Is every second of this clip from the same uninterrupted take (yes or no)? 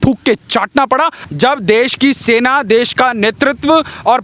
no